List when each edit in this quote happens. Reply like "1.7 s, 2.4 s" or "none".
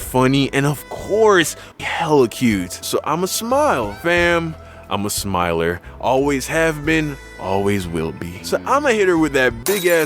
1.7 s